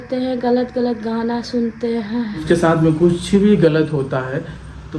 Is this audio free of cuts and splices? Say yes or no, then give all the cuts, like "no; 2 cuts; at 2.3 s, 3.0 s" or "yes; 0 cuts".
no; 1 cut; at 2.4 s